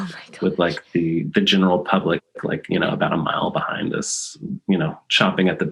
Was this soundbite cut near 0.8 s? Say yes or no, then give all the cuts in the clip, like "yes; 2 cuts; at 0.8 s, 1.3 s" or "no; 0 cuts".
no; 0 cuts